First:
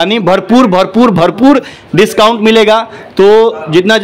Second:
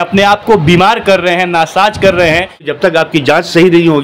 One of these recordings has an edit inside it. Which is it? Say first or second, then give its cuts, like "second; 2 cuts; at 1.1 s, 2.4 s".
second; 1 cut; at 2.7 s